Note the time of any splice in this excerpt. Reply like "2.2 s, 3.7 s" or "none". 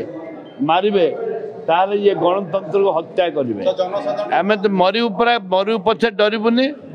4.2 s